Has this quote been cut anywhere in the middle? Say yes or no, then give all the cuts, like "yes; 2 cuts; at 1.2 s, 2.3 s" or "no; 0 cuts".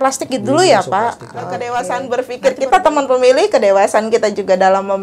yes; 1 cut; at 1.7 s